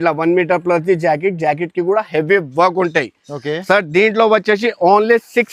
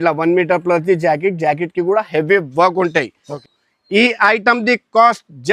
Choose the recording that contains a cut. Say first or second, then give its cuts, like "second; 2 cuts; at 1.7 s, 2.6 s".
second; 1 cut; at 3.5 s